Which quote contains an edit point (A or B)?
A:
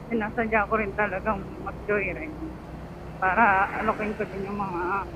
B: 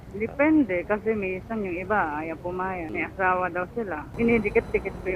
B